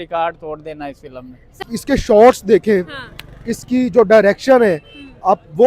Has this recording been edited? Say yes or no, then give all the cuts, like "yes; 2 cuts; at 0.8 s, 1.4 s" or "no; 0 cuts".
yes; 1 cut; at 1.7 s